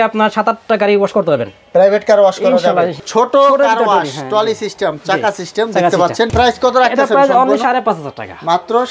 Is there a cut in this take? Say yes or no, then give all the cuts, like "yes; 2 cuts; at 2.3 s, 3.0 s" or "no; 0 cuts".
yes; 2 cuts; at 3.0 s, 6.3 s